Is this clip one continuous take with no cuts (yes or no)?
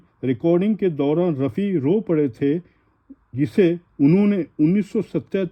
yes